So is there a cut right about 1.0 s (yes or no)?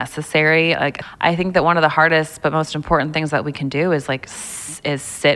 yes